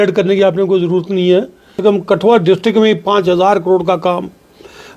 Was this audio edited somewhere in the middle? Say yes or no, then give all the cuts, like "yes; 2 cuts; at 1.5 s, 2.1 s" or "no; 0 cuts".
yes; 1 cut; at 1.8 s